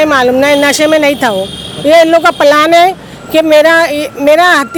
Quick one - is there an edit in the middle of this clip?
no; 0 cuts

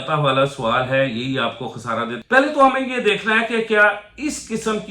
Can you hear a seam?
yes; 1 cut; at 2.2 s

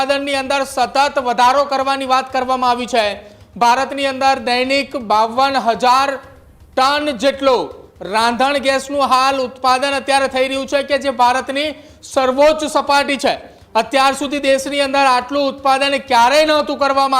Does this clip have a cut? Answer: no; 0 cuts

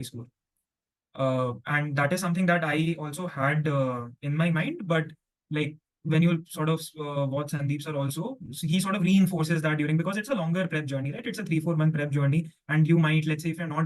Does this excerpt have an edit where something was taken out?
no; 0 cuts

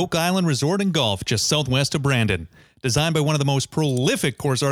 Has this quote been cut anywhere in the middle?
no; 0 cuts

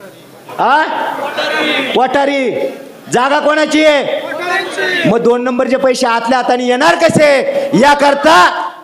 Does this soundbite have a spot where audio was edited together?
no; 0 cuts

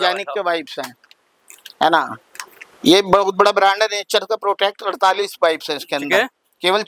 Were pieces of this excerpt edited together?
no; 0 cuts

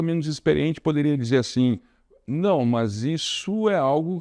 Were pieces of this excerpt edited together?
no; 0 cuts

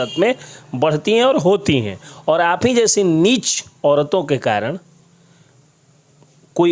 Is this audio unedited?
yes; 0 cuts

